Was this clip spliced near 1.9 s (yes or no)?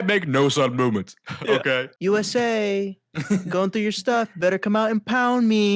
yes